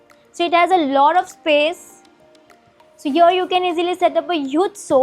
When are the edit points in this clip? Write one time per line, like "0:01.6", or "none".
none